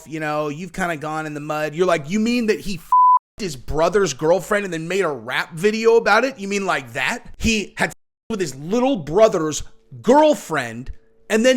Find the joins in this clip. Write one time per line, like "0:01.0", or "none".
0:07.3